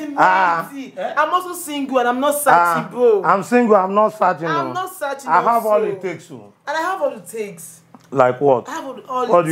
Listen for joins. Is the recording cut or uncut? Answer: uncut